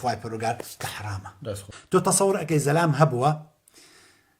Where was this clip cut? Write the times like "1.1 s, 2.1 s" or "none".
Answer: 1.7 s